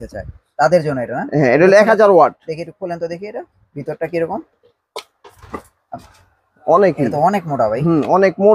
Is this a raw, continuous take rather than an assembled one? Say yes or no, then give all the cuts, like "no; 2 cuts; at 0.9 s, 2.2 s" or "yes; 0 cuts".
yes; 0 cuts